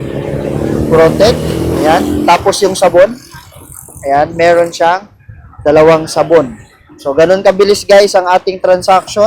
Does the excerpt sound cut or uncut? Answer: uncut